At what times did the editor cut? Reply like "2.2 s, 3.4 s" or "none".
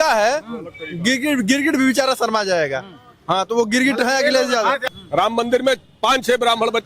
4.9 s